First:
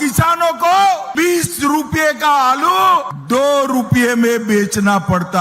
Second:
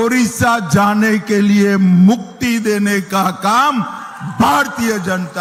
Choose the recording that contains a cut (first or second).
first